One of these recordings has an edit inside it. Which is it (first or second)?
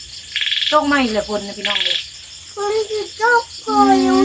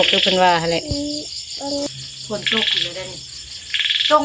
second